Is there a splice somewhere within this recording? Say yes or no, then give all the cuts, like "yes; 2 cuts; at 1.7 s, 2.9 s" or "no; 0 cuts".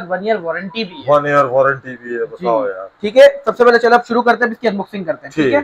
no; 0 cuts